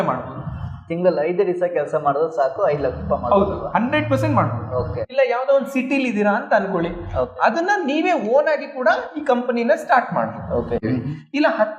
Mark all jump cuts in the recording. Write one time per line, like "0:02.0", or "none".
0:05.0
0:10.8

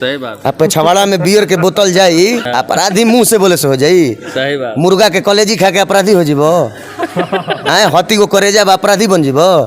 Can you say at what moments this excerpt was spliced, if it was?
0:02.4

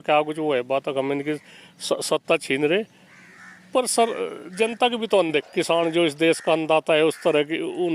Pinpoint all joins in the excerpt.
0:05.5

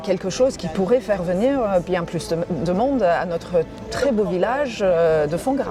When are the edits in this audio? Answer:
none

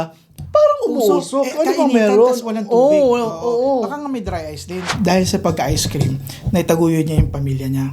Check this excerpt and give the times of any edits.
0:04.9

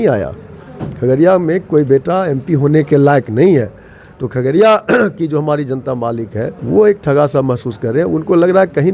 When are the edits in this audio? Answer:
0:06.6

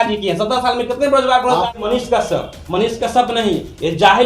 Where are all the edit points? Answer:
0:01.8

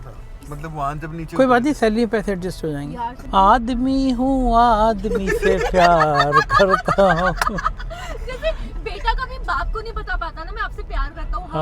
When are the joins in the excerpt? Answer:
0:03.2

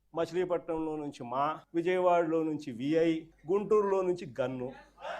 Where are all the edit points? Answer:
0:01.6
0:03.3

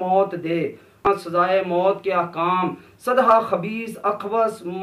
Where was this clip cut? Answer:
none

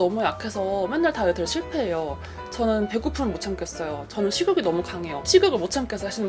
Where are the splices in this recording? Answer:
none

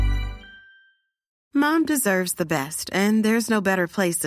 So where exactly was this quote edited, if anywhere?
none

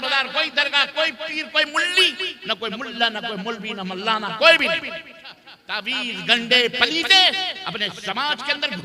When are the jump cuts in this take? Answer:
0:05.7

